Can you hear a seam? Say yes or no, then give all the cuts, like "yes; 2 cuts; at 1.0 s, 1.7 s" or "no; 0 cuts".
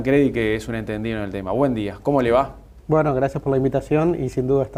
no; 0 cuts